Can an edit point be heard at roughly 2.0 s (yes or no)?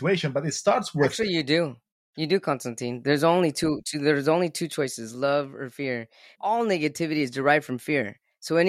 no